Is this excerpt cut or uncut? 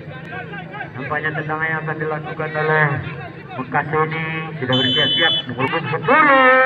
cut